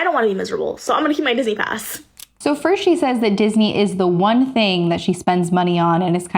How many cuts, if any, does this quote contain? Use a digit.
0